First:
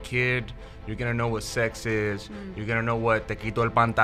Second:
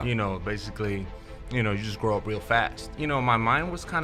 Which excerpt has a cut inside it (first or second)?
second